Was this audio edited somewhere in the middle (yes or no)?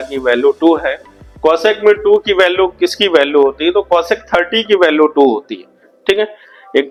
no